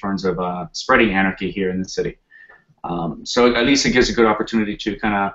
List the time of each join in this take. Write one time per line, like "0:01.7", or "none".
0:01.4